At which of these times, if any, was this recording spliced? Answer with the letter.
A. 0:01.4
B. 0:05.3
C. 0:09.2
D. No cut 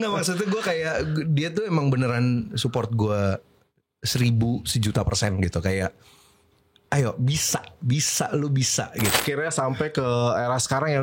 C